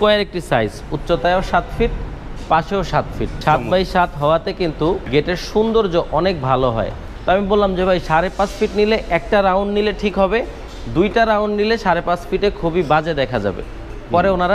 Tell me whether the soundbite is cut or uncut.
cut